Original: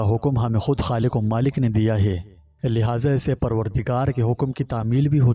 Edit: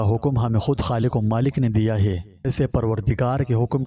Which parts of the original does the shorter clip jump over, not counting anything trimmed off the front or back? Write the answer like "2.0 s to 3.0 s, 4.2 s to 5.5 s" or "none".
2.5 s to 3.2 s